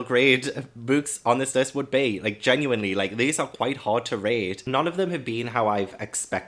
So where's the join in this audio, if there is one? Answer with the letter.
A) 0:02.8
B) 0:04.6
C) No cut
B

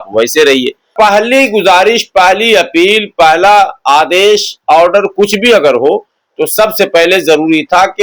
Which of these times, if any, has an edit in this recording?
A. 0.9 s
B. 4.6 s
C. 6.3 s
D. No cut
A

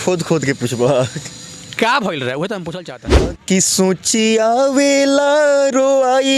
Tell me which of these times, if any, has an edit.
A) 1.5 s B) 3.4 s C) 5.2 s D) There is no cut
B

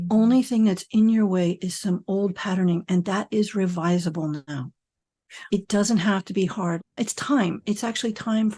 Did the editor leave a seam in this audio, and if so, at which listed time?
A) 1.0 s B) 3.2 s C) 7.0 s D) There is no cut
C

